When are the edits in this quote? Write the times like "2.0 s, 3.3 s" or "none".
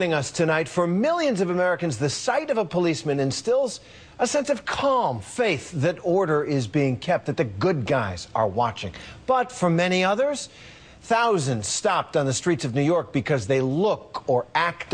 none